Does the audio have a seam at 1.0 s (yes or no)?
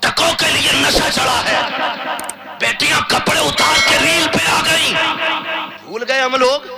no